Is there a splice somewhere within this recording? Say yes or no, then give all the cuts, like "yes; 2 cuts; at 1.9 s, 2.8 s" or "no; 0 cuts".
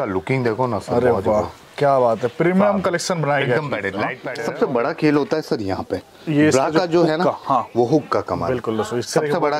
yes; 1 cut; at 4.2 s